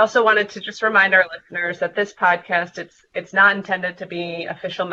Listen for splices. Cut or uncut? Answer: uncut